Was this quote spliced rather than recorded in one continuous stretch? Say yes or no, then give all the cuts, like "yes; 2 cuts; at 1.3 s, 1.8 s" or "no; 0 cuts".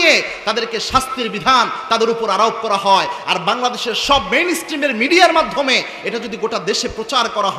no; 0 cuts